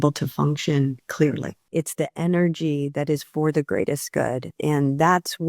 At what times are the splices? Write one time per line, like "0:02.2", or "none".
0:01.6
0:04.6